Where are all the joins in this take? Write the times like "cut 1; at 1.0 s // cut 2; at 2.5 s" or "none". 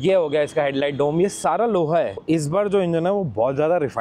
cut 1; at 2.2 s